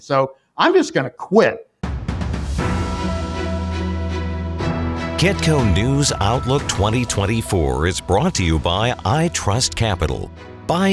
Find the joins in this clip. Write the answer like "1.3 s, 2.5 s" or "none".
1.7 s

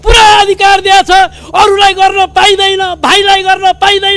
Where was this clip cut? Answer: none

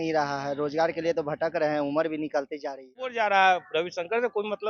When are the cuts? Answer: 3.1 s

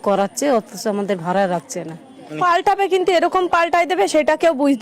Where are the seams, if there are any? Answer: 2.4 s

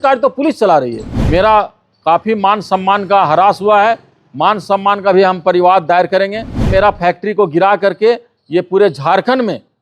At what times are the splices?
1.1 s, 6.6 s

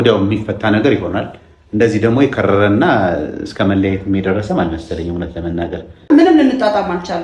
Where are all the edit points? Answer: 6.1 s

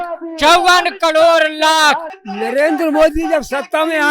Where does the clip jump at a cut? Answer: 2.2 s

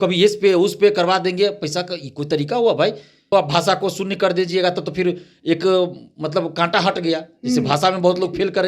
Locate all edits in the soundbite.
3.3 s

